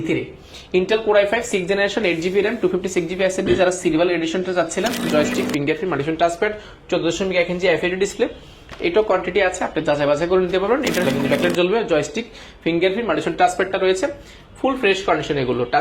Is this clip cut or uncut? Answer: cut